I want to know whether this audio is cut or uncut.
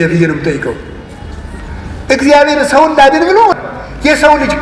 cut